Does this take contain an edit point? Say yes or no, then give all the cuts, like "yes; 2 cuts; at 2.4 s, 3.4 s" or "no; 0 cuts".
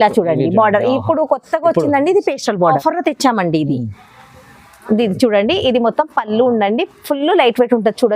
yes; 1 cut; at 2.8 s